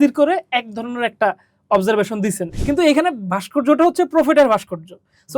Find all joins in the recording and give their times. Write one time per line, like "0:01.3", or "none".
0:02.5